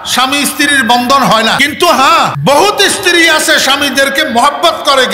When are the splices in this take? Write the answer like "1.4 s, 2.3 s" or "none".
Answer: 1.6 s, 2.4 s